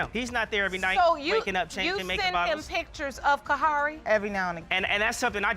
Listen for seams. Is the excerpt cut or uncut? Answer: cut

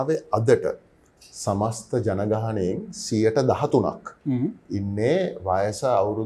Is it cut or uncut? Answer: uncut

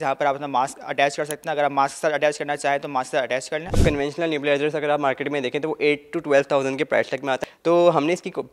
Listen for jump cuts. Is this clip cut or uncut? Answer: cut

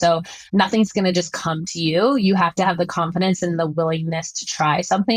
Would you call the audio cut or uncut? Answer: uncut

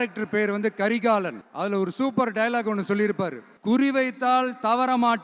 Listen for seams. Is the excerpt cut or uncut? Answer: cut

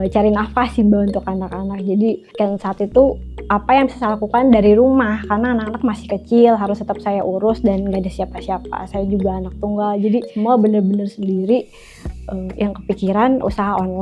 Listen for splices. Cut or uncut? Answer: cut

